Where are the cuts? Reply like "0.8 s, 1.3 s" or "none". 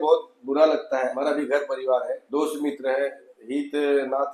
1.2 s, 2.2 s, 3.3 s